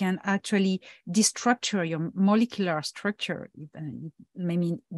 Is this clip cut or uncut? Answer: uncut